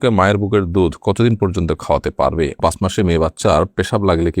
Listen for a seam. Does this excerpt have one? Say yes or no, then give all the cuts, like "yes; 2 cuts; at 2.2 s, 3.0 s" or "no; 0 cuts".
yes; 1 cut; at 2.6 s